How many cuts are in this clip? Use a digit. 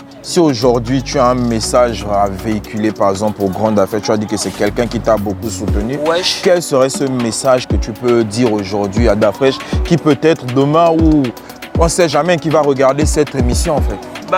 0